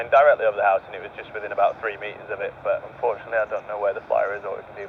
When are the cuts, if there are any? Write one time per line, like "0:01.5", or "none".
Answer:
none